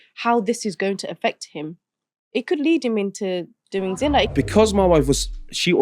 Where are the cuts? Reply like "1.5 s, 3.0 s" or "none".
4.3 s